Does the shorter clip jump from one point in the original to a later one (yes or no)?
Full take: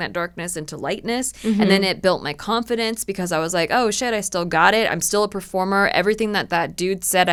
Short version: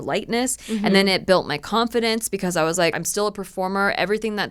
yes